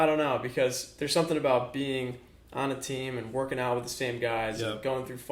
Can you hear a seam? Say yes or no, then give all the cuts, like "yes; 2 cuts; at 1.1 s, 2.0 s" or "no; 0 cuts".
no; 0 cuts